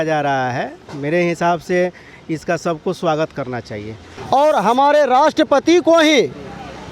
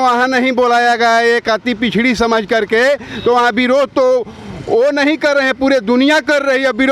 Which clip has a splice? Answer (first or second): first